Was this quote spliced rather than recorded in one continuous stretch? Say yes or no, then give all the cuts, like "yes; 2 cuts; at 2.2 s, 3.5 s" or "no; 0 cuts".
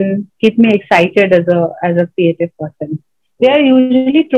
yes; 1 cut; at 3.2 s